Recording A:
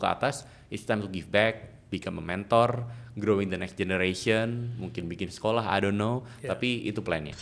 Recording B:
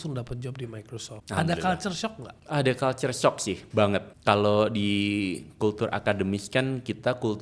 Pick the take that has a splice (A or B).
B